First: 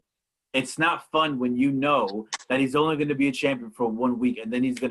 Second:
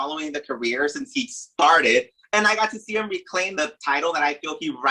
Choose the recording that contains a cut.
second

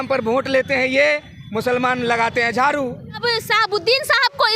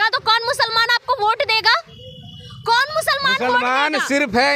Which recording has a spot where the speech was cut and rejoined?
first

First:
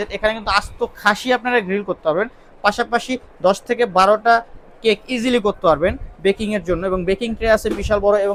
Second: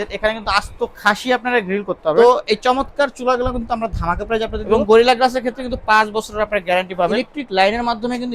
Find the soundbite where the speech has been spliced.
second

